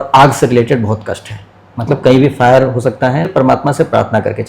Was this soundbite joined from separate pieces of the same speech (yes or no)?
yes